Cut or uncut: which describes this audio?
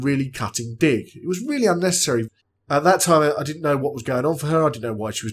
cut